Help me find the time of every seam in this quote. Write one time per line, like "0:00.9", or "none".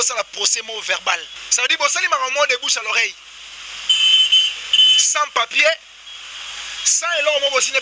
0:01.4